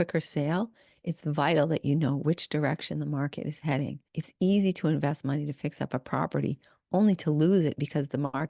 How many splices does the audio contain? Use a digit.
0